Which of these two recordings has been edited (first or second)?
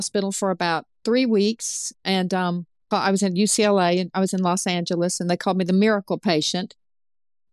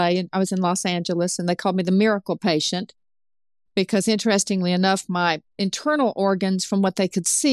first